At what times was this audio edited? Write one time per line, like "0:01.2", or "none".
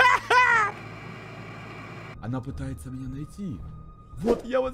0:02.1

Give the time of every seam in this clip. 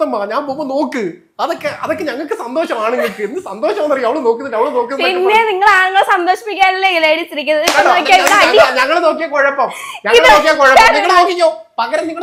none

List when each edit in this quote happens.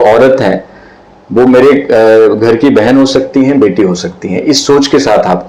none

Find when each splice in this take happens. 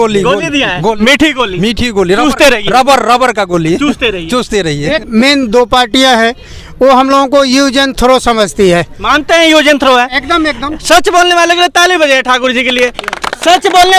0:05.0

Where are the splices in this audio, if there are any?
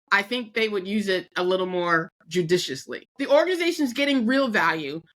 0:02.2
0:03.0

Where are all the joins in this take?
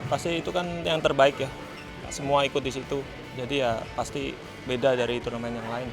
0:04.5

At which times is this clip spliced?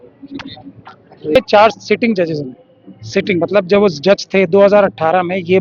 0:01.4

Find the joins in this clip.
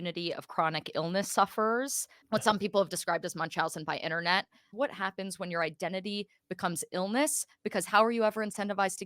0:02.1
0:04.6

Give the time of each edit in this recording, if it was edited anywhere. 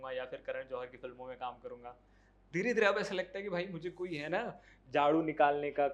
none

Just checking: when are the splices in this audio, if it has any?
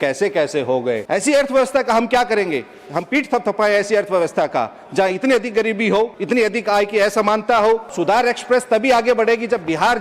0:01.0
0:06.2
0:07.9

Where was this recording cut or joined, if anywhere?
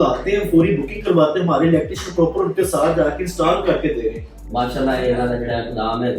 0:04.3

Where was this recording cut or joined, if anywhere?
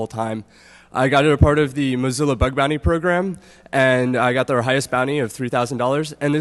0:04.8

